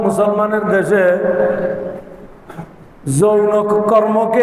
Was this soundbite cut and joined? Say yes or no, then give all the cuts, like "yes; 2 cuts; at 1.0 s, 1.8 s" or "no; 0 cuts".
no; 0 cuts